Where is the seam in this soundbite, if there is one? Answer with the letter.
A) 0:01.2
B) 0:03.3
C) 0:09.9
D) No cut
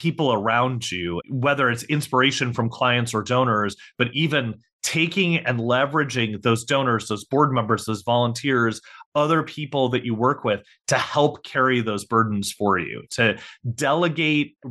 A